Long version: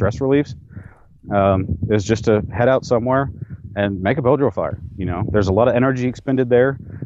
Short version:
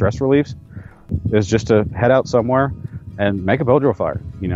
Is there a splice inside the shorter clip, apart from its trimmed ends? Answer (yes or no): yes